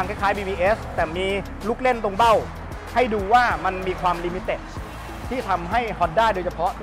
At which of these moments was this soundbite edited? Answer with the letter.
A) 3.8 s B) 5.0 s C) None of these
C